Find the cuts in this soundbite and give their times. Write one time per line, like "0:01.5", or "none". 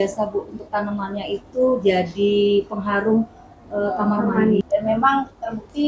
0:04.6